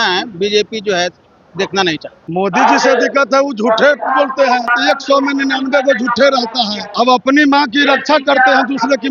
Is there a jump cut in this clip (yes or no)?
yes